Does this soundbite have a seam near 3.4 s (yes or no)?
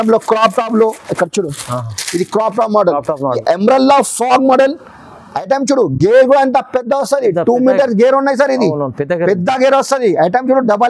yes